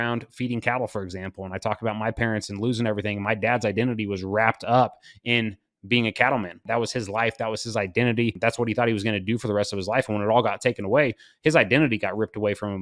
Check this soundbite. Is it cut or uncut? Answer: cut